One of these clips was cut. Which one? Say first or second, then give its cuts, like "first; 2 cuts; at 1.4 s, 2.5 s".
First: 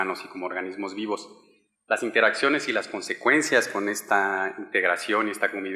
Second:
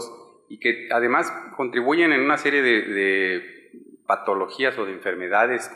second; 1 cut; at 1.0 s